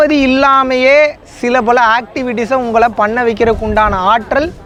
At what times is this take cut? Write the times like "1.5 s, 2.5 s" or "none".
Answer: none